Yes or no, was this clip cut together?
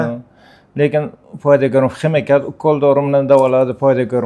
no